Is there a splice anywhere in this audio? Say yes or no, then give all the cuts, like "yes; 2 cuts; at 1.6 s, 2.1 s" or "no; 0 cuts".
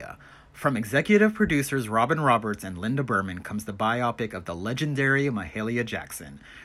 no; 0 cuts